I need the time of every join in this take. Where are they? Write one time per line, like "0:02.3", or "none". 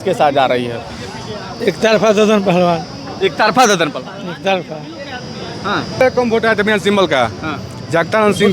0:06.0